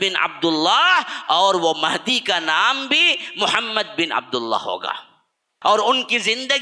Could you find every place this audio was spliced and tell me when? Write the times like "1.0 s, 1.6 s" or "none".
5.5 s